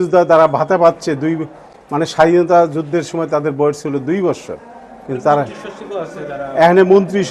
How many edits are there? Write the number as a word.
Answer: zero